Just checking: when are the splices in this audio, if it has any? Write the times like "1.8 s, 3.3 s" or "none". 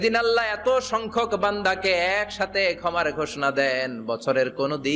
none

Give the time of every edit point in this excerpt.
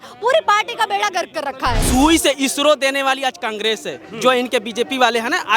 1.8 s

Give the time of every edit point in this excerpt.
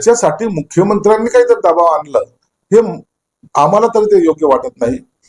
none

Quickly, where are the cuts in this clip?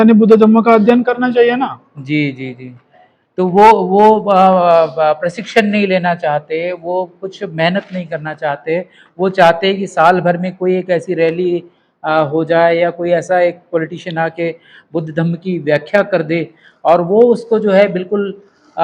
none

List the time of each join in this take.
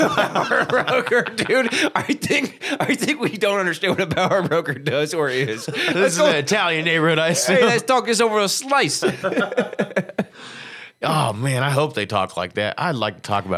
5.9 s

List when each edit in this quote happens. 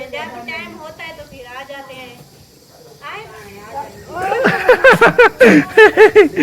3.3 s

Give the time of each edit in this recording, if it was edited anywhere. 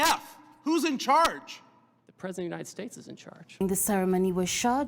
3.6 s

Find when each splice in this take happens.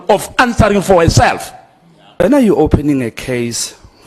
2.2 s

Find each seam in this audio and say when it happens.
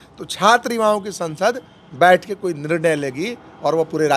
none

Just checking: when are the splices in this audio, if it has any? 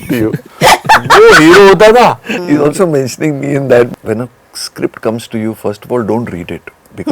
2.3 s, 3.9 s

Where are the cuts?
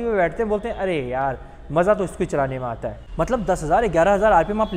3.0 s

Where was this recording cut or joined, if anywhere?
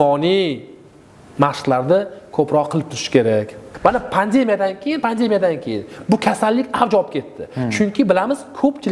3.6 s

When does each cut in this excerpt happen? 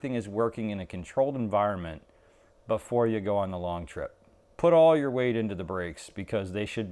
none

